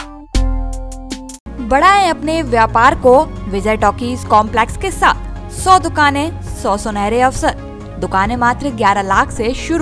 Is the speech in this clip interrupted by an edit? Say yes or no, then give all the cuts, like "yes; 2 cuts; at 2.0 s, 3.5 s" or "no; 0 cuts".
no; 0 cuts